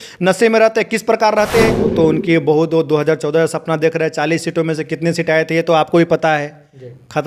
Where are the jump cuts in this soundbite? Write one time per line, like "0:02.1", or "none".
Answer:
0:01.8